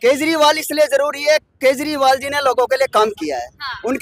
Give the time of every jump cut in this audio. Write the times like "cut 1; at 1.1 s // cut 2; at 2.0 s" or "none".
none